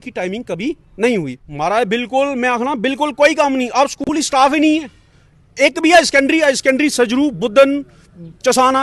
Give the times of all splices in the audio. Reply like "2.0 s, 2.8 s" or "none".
1.1 s